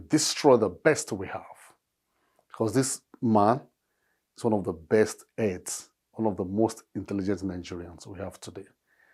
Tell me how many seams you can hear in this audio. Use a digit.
0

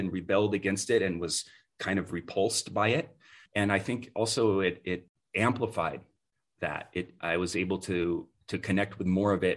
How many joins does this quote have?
2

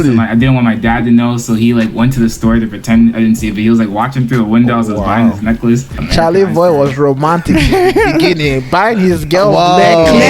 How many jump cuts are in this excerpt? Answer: 1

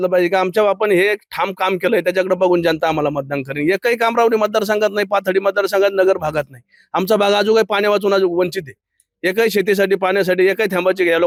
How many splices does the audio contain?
0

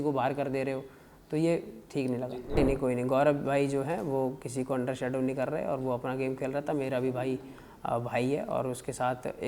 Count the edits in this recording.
1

